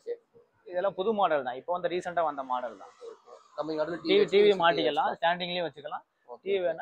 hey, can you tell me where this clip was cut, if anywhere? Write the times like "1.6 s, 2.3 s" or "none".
none